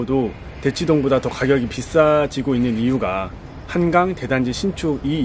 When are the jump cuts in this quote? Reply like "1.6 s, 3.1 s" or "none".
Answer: none